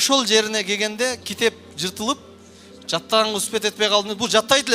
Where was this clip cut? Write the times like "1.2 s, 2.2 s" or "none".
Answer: none